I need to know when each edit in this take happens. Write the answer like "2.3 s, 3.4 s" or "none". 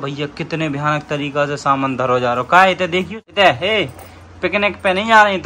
3.1 s